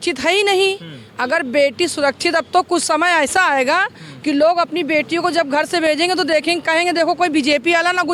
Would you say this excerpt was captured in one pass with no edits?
yes; 0 cuts

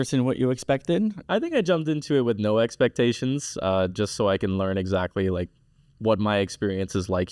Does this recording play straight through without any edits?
no; 1 cut; at 1.2 s

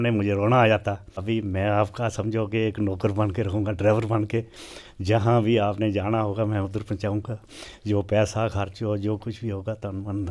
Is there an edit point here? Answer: yes; 1 cut; at 1.2 s

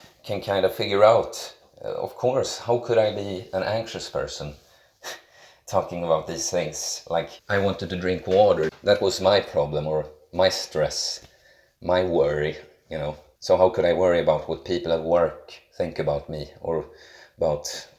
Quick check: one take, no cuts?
no; 2 cuts; at 7.4 s, 8.7 s

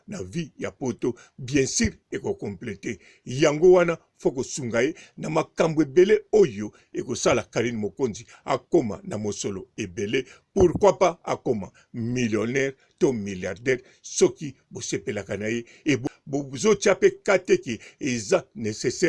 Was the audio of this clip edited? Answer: yes; 1 cut; at 16.1 s

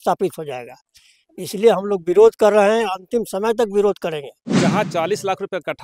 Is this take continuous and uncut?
no; 1 cut; at 4.5 s

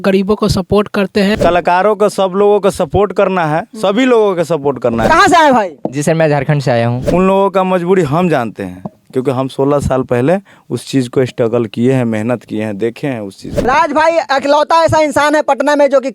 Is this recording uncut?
no; 4 cuts; at 1.4 s, 5.1 s, 7.0 s, 13.5 s

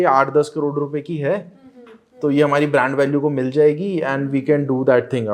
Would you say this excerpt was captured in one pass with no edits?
yes; 0 cuts

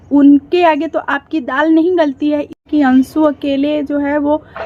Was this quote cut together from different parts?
yes; 1 cut; at 2.2 s

